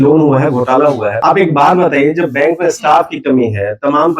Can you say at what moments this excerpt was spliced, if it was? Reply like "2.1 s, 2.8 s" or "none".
1.1 s